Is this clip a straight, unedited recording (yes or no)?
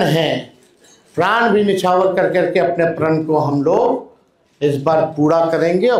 yes